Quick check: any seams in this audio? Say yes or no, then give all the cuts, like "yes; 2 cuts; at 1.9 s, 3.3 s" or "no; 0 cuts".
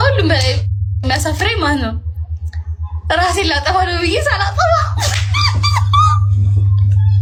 no; 0 cuts